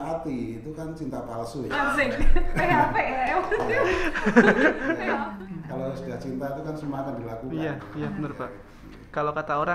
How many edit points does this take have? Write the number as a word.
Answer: one